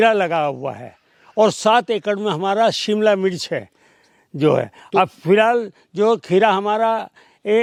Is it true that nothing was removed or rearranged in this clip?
yes; 0 cuts

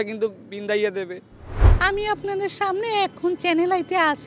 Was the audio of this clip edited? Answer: yes; 1 cut; at 1.7 s

